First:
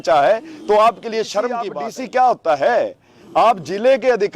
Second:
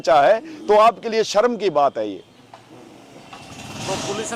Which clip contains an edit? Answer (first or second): first